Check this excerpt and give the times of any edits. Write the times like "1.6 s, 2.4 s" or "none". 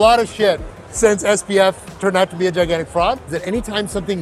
3.3 s